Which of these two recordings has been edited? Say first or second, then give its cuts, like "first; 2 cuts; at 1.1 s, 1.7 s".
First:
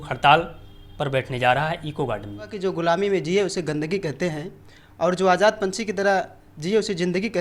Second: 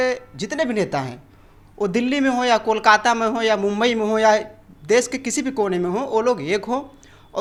first; 1 cut; at 2.5 s